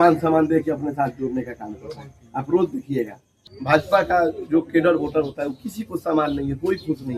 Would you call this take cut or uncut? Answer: cut